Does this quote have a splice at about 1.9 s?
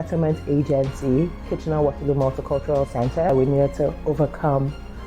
no; 1 cut; at 3.3 s

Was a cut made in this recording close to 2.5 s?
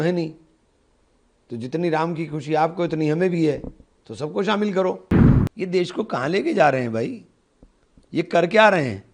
no; 1 cut; at 5.0 s

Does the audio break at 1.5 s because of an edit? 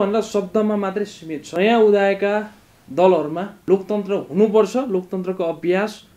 yes; 1 cut; at 1.5 s

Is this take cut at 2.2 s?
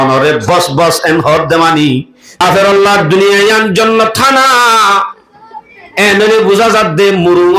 yes; 1 cut; at 2.2 s

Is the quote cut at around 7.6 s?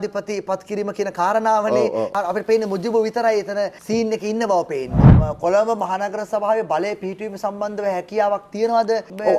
no; 2 cuts; at 2.1 s, 5.0 s

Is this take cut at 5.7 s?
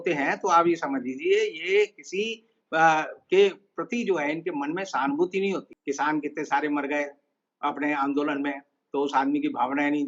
yes; 1 cut; at 5.7 s

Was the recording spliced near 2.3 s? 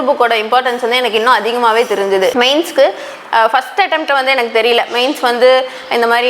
yes; 1 cut; at 2.3 s

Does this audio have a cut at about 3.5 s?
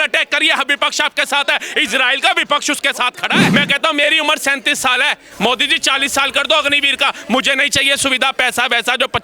yes; 1 cut; at 3.5 s

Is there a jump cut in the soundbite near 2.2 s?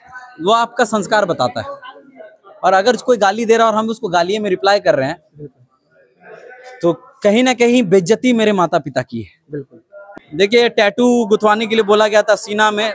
no; 1 cut; at 10.0 s

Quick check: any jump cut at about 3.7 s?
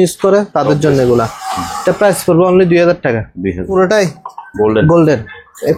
yes; 1 cut; at 3.7 s

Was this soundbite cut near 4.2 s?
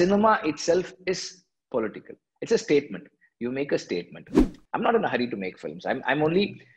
yes; 1 cut; at 4.2 s

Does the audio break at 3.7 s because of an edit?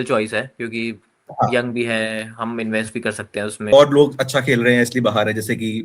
yes; 1 cut; at 3.7 s

